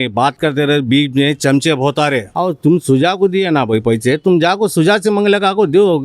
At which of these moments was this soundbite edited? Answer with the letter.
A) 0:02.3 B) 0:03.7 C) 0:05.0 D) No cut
A